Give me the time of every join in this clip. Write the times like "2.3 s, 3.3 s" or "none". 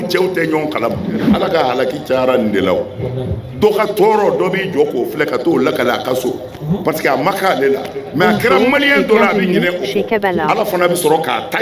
1.3 s